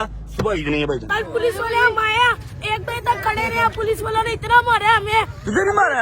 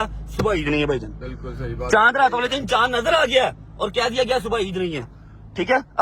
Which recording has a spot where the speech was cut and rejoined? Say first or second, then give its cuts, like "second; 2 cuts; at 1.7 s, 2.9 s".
first; 1 cut; at 1.1 s